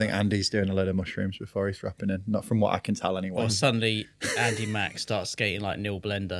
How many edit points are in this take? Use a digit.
0